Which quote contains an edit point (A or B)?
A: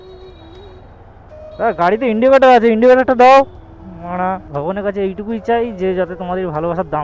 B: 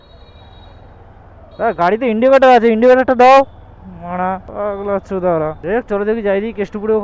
A